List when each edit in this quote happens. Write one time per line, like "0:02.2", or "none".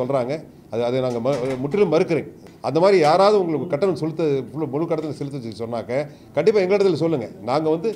0:02.5